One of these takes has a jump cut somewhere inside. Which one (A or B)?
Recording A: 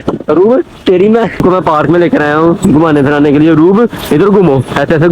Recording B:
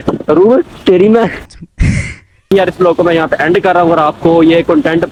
A